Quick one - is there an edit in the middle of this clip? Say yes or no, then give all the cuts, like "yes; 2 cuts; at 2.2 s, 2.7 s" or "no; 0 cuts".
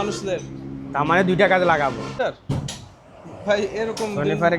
yes; 1 cut; at 2.1 s